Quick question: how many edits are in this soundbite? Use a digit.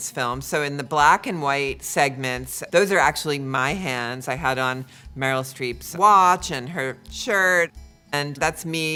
0